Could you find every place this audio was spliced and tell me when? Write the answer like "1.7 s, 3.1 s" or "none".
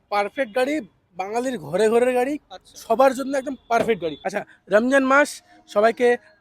4.5 s